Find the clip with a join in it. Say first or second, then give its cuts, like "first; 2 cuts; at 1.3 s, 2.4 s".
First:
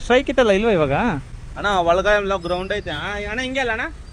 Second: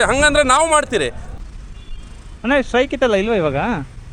second; 1 cut; at 1.2 s